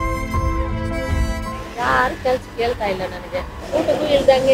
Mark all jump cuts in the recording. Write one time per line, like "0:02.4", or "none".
0:01.6
0:03.6

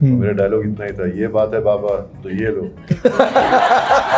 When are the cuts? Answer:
none

